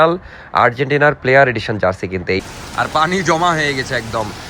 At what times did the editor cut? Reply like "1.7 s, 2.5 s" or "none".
2.4 s